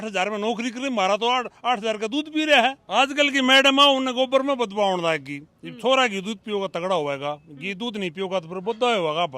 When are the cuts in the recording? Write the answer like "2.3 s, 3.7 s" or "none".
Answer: 2.8 s